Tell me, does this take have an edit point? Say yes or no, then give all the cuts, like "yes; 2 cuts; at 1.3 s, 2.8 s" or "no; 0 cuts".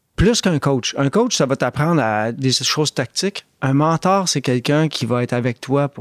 no; 0 cuts